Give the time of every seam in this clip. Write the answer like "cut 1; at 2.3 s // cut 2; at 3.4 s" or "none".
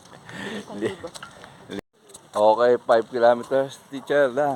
cut 1; at 1.8 s